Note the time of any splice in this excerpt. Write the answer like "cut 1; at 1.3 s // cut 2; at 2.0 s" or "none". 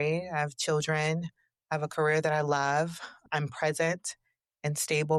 none